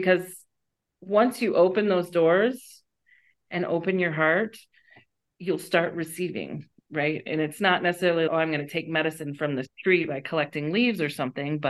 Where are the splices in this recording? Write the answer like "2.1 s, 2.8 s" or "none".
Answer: none